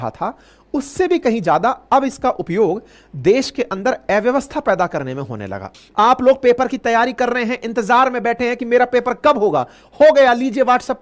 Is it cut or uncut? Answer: cut